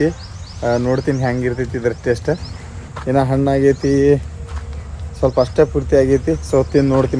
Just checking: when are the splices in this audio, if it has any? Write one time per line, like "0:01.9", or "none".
none